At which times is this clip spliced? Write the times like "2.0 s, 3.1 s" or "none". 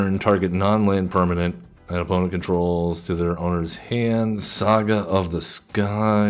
4.4 s